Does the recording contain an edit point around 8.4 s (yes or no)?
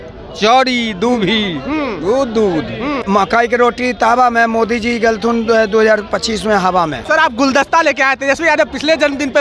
no